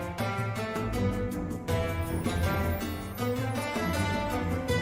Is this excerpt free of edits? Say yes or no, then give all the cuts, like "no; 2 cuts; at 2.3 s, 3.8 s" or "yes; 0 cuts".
yes; 0 cuts